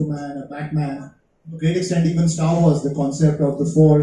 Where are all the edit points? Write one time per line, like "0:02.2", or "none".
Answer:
none

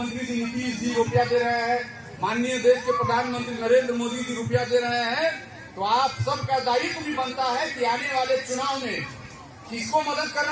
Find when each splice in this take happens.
none

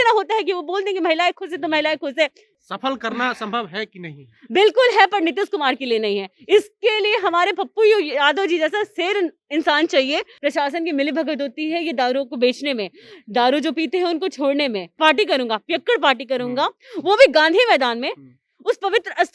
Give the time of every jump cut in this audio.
0:02.4
0:10.3
0:14.9

